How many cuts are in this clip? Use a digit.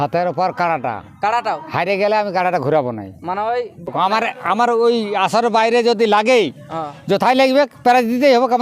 1